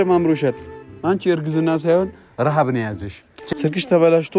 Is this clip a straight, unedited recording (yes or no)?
no